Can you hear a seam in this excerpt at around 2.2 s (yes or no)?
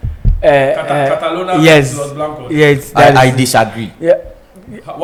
no